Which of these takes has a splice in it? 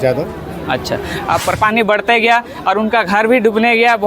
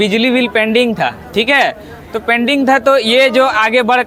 first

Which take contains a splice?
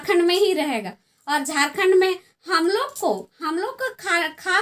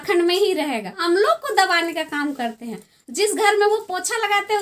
second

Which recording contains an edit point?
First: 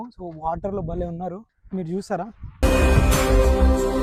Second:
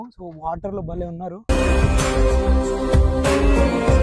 second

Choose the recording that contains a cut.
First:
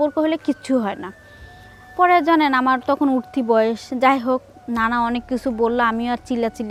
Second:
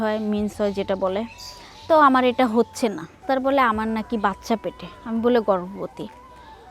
second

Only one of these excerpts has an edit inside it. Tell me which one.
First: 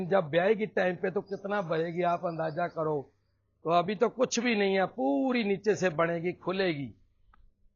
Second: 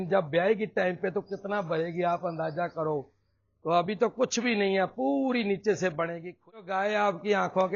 second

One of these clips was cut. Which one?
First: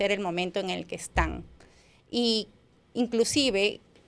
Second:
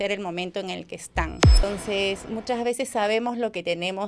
second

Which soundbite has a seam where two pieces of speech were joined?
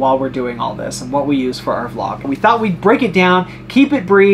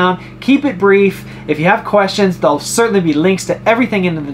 first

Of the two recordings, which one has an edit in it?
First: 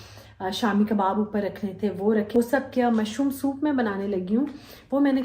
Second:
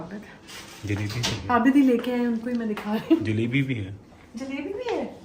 first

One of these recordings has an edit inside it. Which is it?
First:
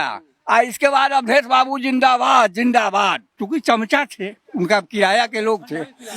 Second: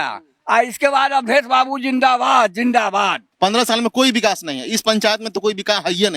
second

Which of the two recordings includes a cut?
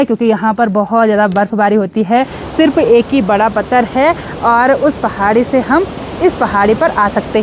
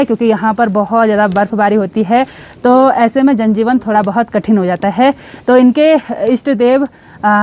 first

